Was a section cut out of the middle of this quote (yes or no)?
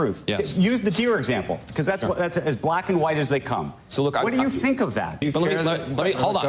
yes